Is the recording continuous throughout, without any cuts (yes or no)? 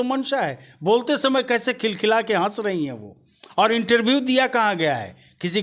yes